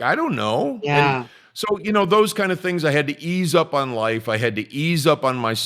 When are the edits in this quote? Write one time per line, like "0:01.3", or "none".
none